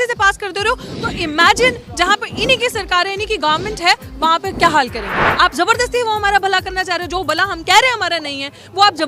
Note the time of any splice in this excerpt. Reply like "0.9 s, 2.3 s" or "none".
5.2 s